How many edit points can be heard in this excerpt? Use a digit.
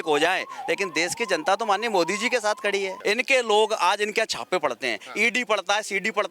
1